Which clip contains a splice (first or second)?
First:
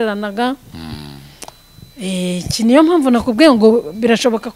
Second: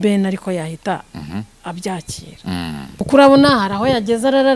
second